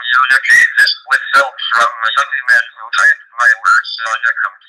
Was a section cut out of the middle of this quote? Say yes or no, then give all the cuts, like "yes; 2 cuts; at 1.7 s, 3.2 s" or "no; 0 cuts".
no; 0 cuts